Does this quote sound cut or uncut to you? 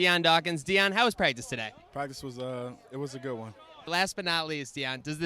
cut